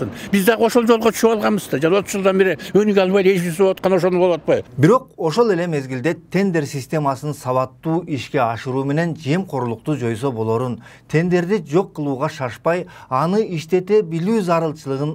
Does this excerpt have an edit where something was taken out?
no; 0 cuts

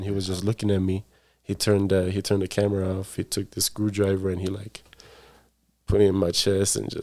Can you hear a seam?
no; 0 cuts

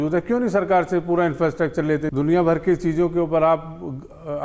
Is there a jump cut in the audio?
yes; 1 cut; at 2.1 s

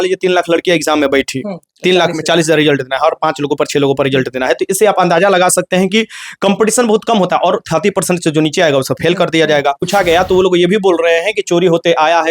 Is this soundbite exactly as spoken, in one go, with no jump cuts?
no; 1 cut; at 9.9 s

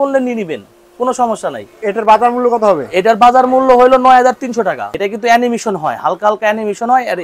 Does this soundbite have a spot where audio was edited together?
yes; 1 cut; at 4.9 s

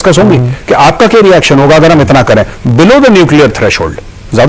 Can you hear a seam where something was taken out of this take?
no; 0 cuts

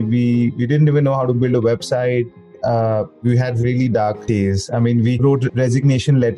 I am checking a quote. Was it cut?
yes; 3 cuts; at 2.6 s, 4.2 s, 5.2 s

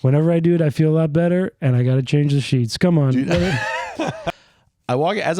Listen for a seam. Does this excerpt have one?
yes; 1 cut; at 4.2 s

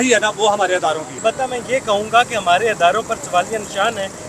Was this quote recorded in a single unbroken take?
no; 1 cut; at 1.2 s

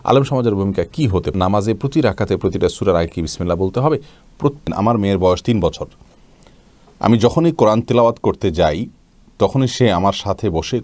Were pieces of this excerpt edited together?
yes; 2 cuts; at 1.3 s, 4.7 s

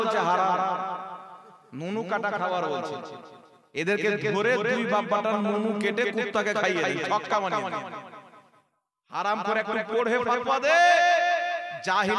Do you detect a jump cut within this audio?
no; 0 cuts

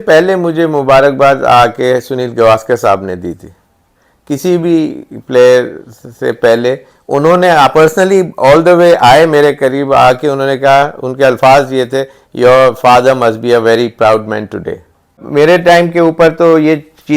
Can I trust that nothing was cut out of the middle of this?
no; 1 cut; at 15.2 s

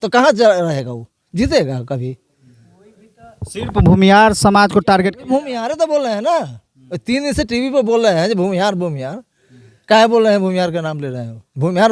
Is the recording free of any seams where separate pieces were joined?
yes; 0 cuts

